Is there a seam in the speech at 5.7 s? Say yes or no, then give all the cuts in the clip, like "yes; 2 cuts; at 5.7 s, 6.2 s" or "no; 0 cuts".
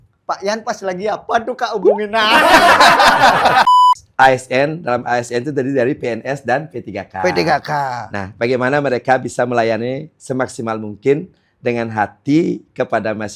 no; 1 cut; at 3.6 s